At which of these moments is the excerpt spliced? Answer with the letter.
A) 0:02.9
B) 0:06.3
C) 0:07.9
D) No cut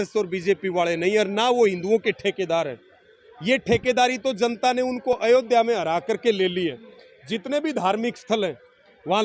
D